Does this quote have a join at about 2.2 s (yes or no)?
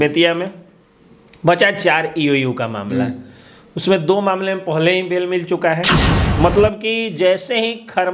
no